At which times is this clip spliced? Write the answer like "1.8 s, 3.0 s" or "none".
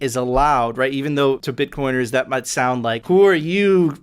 2.6 s

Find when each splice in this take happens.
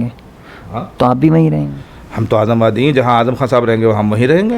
none

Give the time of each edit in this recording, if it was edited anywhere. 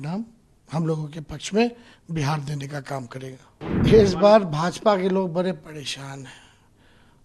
3.6 s

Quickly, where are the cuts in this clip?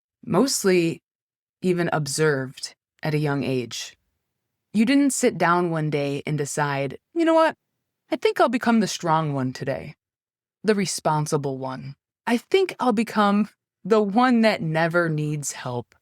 10.5 s, 12.2 s

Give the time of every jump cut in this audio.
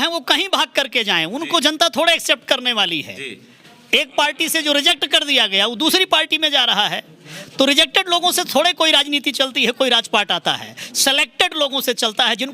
none

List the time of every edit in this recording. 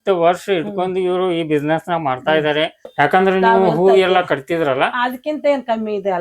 2.8 s

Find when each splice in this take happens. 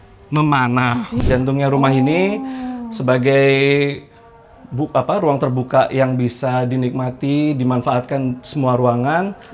1.2 s

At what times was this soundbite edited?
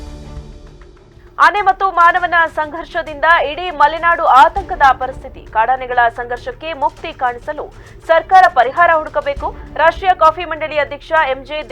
1.2 s

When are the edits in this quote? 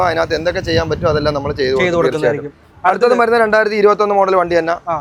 none

